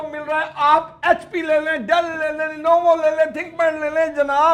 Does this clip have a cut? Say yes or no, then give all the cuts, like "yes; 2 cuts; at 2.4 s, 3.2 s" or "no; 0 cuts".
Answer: no; 0 cuts